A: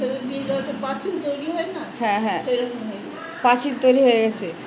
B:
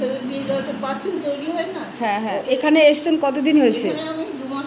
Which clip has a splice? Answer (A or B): B